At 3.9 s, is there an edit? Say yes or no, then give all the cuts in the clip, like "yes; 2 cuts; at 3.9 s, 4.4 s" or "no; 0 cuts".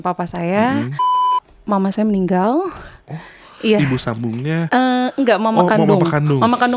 no; 1 cut; at 1.3 s